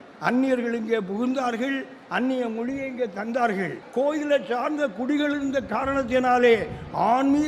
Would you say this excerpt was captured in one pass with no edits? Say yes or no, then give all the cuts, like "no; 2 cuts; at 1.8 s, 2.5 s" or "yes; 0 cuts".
no; 1 cut; at 3.8 s